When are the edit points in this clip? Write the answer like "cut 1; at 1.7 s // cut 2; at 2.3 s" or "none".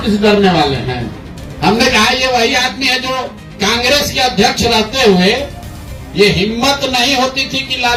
none